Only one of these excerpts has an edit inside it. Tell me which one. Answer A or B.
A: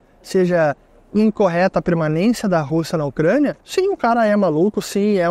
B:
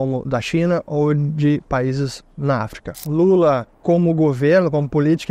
B